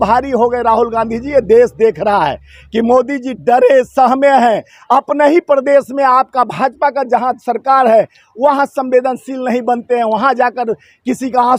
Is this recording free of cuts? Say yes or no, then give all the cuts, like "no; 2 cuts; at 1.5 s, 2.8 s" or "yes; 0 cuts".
yes; 0 cuts